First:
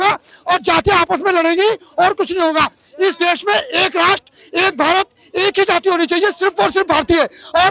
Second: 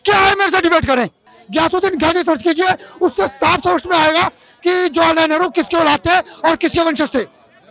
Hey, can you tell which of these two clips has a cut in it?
second; 1 cut; at 1.4 s

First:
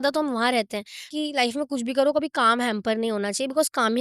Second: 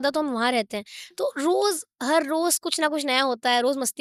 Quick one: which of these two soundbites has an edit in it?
first; 1 cut; at 1.1 s

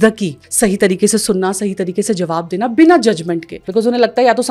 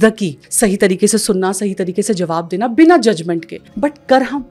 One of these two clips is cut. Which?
first; 1 cut; at 3.5 s

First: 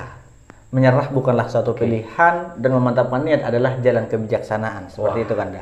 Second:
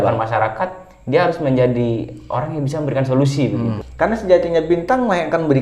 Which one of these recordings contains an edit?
second; 1 cut; at 3.8 s

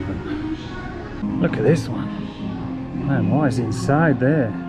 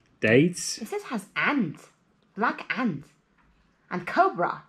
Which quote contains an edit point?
first; 1 cut; at 1.2 s

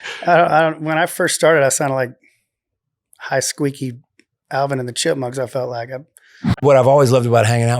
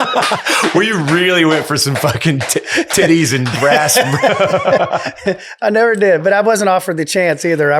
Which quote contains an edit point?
first; 1 cut; at 6.6 s

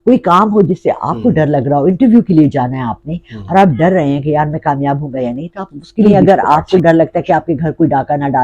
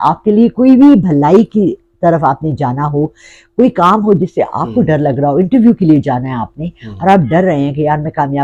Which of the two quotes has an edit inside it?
first; 1 cut; at 6.1 s

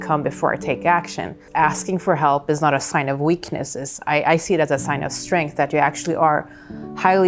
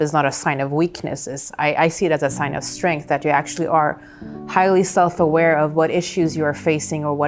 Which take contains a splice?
first; 1 cut; at 1.4 s

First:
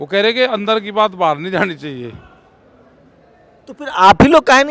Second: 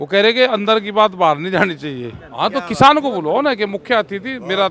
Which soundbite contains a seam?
second; 1 cut; at 2.2 s

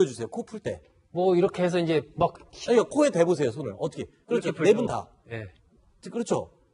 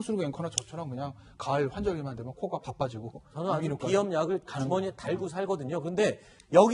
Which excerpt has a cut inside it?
first; 1 cut; at 2.6 s

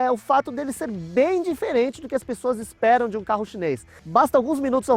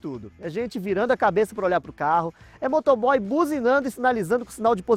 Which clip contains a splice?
first; 1 cut; at 3.9 s

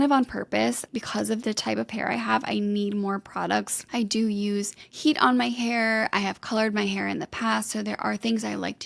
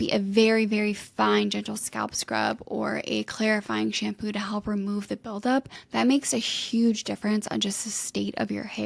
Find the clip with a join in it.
first; 2 cuts; at 0.9 s, 3.8 s

